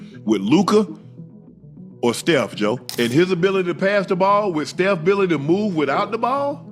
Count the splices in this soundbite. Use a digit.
1